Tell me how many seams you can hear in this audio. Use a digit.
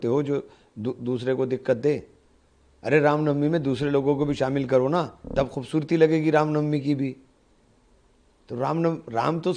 0